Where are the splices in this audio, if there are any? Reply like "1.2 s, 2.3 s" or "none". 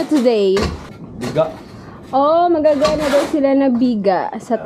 1.0 s

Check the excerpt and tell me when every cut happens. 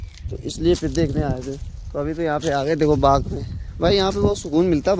none

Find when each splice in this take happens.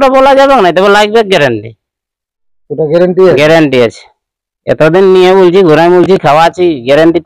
none

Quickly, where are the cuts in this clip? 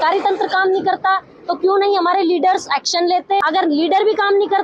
3.4 s

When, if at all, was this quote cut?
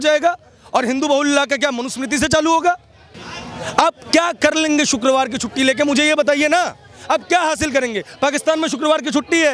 none

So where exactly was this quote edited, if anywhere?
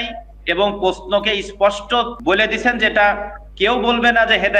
2.1 s

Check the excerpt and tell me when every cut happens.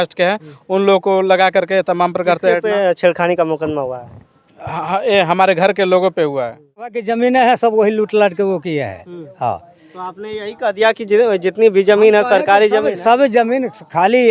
7.0 s

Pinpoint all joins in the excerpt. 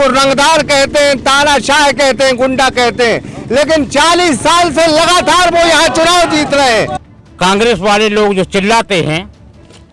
7.0 s

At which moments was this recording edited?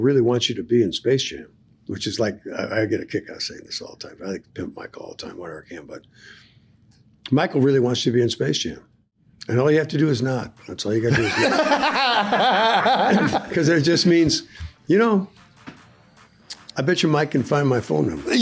none

